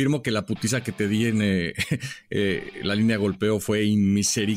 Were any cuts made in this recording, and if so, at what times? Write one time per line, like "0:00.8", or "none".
none